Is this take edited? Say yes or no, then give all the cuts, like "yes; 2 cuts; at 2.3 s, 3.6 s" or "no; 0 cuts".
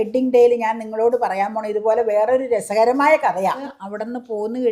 yes; 1 cut; at 3.6 s